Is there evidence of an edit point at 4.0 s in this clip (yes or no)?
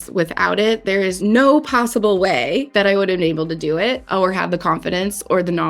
yes